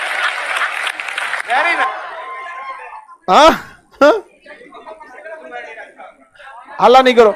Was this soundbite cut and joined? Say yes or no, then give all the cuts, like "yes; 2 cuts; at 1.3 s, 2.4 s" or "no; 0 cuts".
yes; 1 cut; at 1.7 s